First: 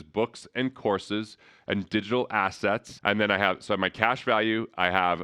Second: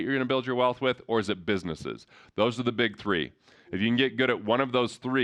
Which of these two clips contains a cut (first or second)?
first